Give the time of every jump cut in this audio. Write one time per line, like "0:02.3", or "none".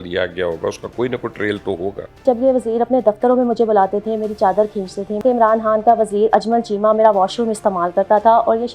0:02.2
0:05.2